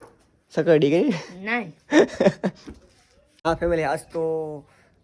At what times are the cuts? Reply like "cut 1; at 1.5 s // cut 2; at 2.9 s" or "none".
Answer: cut 1; at 3.4 s